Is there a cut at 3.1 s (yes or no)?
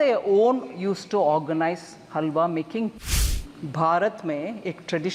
yes